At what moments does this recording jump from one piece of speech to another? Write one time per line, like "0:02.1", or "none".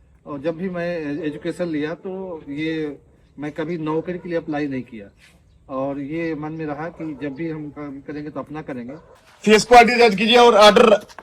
0:09.1